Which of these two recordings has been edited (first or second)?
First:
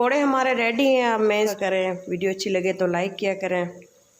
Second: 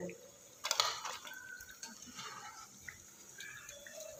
first